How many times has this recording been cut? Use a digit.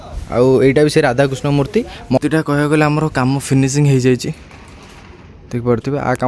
1